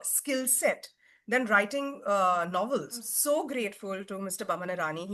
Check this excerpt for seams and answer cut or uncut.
cut